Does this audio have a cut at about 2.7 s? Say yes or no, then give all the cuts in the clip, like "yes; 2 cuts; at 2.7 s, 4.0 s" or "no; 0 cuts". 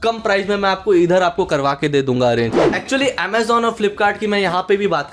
yes; 1 cut; at 2.7 s